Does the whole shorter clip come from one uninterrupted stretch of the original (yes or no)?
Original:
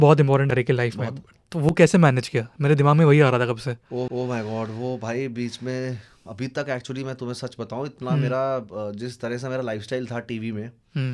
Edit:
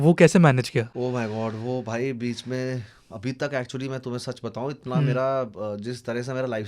no